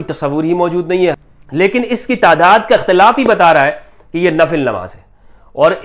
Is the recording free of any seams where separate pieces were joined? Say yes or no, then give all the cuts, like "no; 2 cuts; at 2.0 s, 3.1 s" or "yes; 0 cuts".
no; 1 cut; at 1.2 s